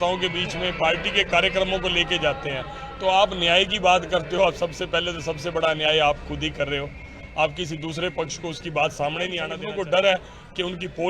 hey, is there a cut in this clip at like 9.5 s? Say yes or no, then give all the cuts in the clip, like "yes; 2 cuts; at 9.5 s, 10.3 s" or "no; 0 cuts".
yes; 1 cut; at 9.5 s